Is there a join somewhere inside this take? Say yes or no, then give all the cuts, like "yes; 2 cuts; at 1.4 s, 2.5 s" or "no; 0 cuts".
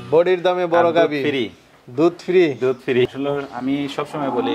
yes; 1 cut; at 3.1 s